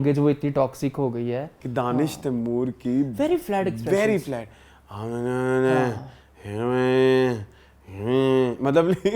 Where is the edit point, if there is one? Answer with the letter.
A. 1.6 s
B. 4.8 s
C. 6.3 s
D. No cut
A